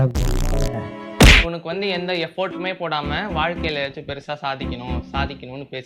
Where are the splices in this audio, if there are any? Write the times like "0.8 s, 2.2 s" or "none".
1.4 s